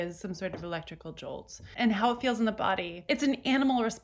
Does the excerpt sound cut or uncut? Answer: cut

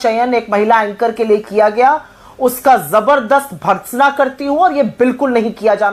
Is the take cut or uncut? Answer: uncut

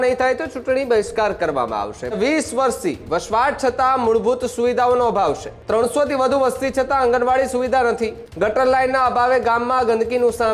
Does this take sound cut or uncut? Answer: cut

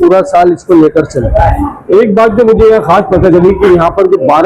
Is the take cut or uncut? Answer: uncut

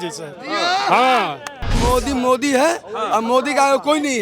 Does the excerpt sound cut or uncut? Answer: cut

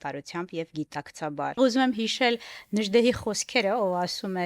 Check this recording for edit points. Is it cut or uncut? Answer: cut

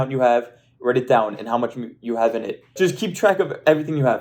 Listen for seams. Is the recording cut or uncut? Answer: cut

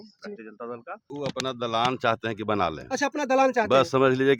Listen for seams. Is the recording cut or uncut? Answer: cut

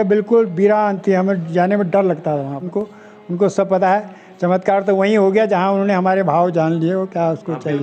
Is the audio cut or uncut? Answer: cut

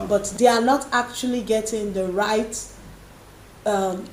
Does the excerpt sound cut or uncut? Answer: uncut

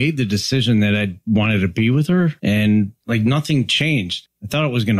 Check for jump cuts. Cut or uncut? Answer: cut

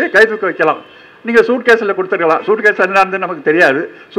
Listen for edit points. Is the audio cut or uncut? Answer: uncut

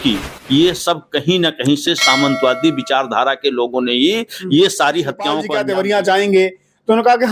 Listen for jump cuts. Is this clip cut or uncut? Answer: cut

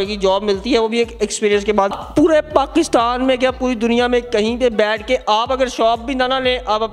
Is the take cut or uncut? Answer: cut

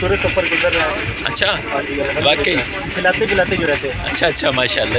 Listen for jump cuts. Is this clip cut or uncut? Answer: uncut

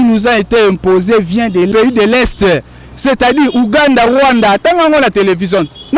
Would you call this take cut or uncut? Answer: cut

